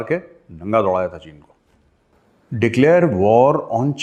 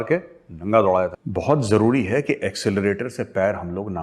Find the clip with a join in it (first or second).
second